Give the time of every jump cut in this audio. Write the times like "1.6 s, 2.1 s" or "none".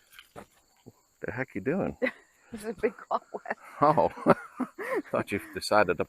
2.5 s